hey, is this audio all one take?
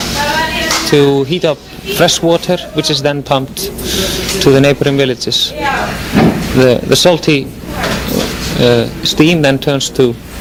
yes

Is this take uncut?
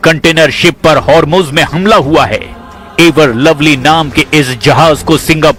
yes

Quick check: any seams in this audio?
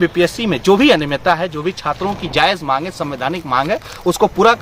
no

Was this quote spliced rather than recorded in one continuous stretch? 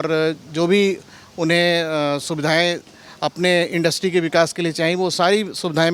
no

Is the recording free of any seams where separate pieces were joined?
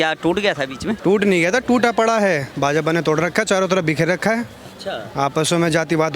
no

